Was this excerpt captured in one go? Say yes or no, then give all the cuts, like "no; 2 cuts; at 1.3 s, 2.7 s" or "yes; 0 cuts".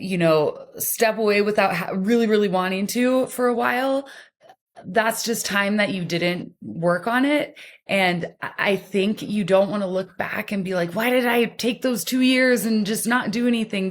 yes; 0 cuts